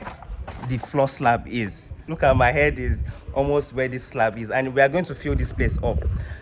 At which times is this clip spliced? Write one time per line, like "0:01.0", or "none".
0:02.1